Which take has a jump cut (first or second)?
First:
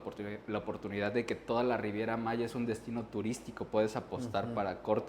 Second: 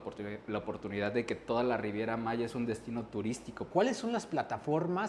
second